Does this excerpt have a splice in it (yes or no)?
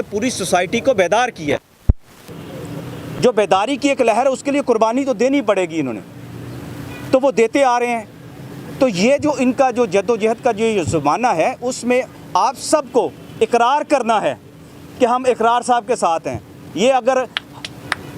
no